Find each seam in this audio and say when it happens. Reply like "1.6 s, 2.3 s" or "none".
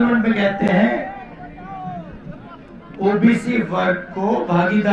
none